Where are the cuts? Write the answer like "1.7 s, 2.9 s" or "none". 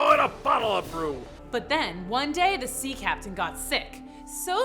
1.3 s